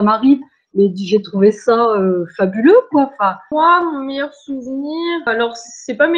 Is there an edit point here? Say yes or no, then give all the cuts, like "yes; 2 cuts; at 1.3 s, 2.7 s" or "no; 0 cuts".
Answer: yes; 2 cuts; at 3.5 s, 5.3 s